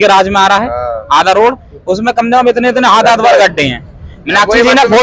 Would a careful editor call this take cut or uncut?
uncut